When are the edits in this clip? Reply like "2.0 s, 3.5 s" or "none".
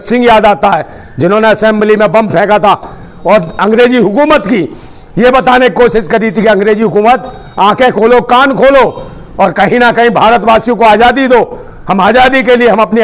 none